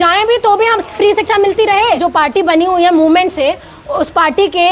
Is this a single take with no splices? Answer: no; 1 cut; at 2.0 s

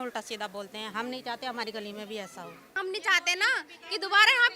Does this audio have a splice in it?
yes; 1 cut; at 2.7 s

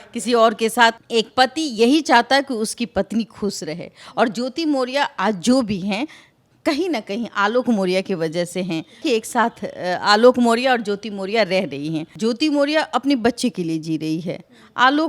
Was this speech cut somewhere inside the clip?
yes; 3 cuts; at 1.0 s, 9.0 s, 12.1 s

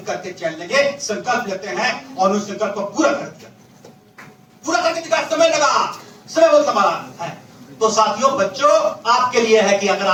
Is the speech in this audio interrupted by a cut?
no; 0 cuts

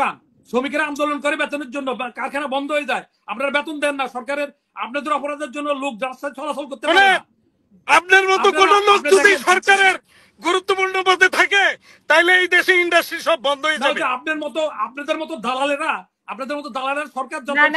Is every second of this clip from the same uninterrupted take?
yes; 0 cuts

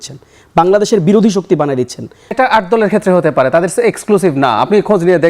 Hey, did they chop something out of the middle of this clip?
yes; 1 cut; at 2.3 s

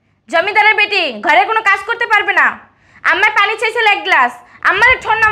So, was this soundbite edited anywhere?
no; 0 cuts

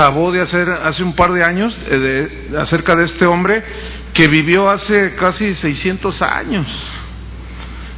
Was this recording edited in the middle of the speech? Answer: no; 0 cuts

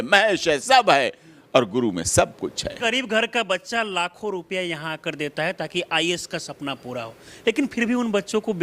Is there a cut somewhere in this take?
yes; 1 cut; at 2.7 s

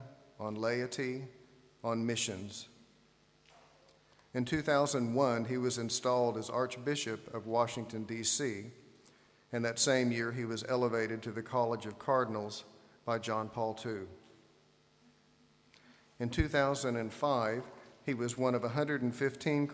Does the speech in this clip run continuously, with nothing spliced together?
yes; 0 cuts

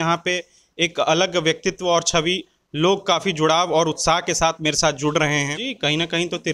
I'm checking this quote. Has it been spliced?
yes; 1 cut; at 5.6 s

